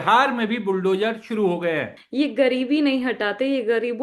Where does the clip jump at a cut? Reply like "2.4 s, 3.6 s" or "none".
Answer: 2.0 s